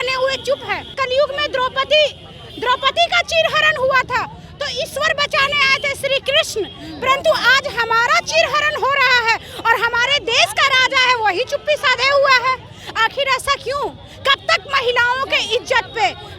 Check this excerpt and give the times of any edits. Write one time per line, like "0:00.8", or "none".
0:00.9